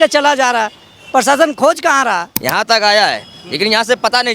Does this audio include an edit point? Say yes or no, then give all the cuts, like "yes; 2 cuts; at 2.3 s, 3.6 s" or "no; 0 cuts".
yes; 1 cut; at 2.3 s